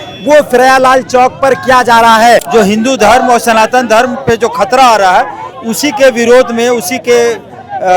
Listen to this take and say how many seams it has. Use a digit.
1